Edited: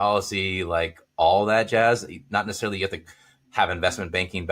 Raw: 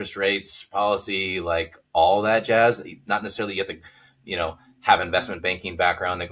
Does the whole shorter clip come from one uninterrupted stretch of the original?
no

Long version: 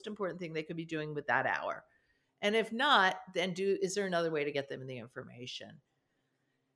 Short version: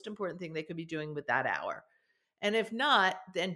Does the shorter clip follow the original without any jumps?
yes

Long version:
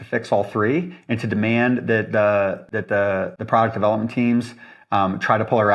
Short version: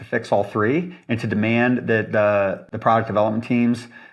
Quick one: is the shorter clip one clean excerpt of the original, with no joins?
no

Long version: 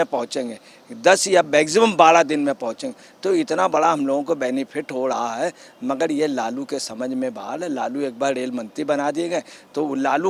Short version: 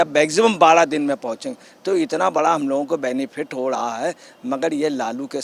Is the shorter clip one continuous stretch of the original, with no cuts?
yes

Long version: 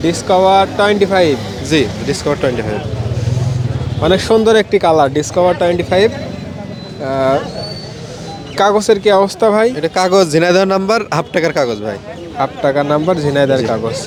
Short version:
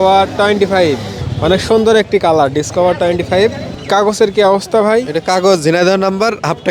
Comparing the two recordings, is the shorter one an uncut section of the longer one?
no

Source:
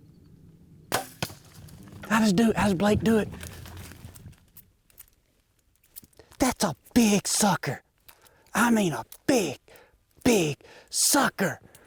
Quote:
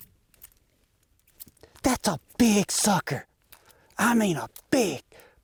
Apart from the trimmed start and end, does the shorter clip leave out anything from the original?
no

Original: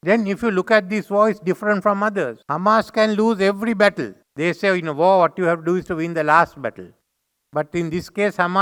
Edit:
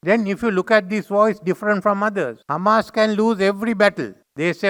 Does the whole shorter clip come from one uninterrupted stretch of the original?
yes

